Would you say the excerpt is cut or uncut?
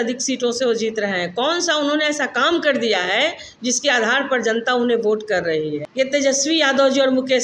cut